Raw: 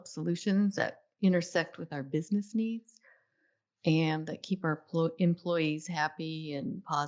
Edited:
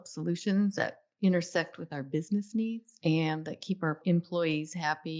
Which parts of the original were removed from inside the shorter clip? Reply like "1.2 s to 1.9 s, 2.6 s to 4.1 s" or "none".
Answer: 2.9 s to 3.7 s, 4.8 s to 5.1 s